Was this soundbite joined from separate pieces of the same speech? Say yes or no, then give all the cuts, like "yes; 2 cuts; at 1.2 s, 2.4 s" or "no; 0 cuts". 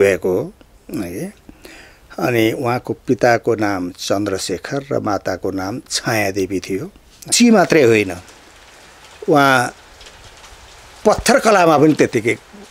yes; 1 cut; at 7.3 s